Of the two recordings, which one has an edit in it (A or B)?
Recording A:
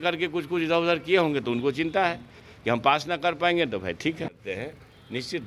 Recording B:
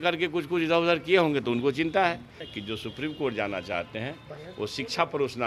B